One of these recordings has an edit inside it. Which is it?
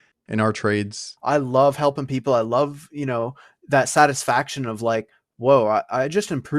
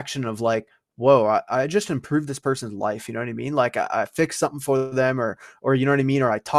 first; 1 cut; at 1.1 s

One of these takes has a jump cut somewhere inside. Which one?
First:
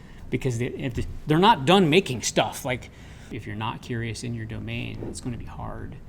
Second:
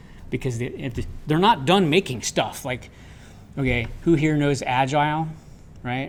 first; 1 cut; at 3.4 s

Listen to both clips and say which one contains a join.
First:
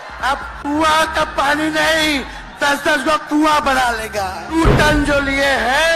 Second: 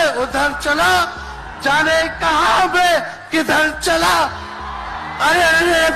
first; 1 cut; at 4.5 s

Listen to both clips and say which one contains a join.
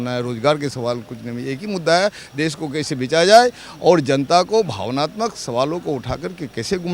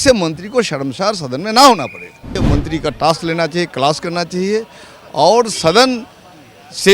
second; 1 cut; at 2.4 s

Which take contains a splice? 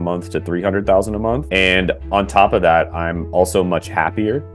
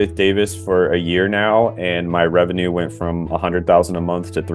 first; 1 cut; at 1.4 s

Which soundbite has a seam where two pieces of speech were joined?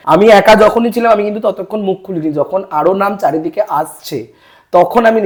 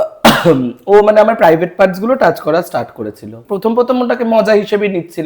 second; 1 cut; at 3.4 s

